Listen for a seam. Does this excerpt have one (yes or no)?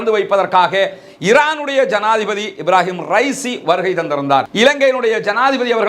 yes